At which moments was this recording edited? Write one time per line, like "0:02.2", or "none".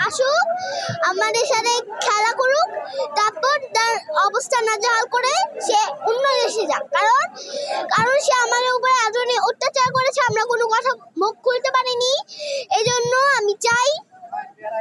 none